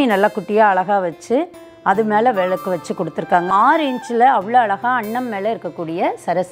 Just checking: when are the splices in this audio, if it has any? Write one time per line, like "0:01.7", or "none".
0:03.5